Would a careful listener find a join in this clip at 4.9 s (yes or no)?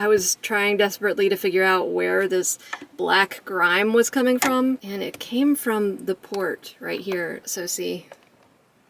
yes